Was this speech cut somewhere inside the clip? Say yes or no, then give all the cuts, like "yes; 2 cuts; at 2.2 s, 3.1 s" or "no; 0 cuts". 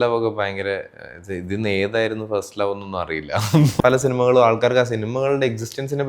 yes; 1 cut; at 3.7 s